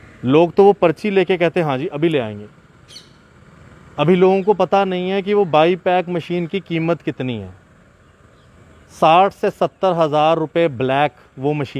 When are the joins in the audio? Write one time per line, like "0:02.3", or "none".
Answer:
none